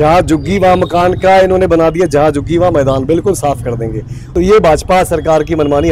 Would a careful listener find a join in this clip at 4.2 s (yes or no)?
yes